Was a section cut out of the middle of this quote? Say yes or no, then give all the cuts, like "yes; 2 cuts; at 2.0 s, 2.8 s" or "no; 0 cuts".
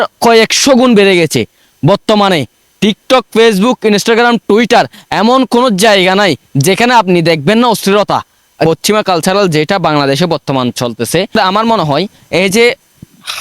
yes; 2 cuts; at 8.7 s, 11.3 s